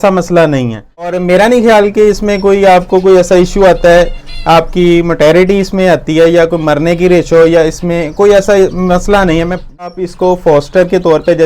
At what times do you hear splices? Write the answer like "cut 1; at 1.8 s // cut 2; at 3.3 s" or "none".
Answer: cut 1; at 1.1 s // cut 2; at 9.8 s